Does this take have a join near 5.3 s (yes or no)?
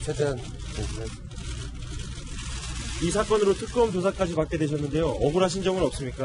no